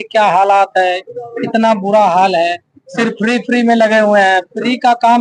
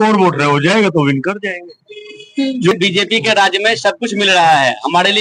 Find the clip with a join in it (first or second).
second